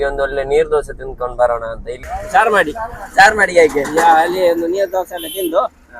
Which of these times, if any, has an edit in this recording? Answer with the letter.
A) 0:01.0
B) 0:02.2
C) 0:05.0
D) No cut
B